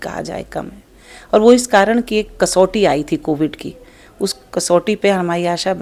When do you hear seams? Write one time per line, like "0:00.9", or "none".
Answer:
none

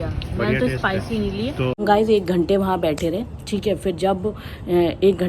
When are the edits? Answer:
0:01.8

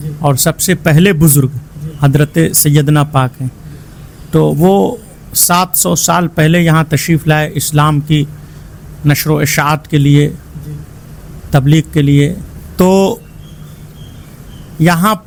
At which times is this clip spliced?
none

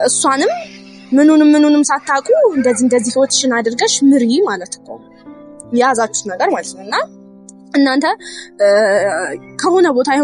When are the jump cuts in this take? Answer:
none

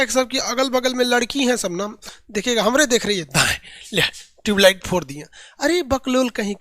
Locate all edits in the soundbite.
0:02.0

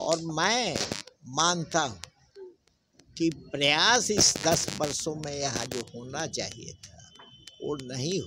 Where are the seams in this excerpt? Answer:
none

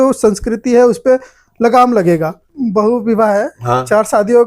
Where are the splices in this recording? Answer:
0:02.5

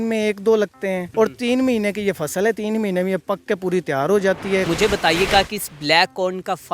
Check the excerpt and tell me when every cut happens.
0:01.0
0:04.7

